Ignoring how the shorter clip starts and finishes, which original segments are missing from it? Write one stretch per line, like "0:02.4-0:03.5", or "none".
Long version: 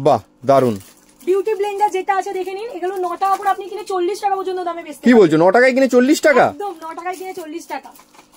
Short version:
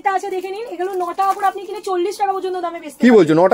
none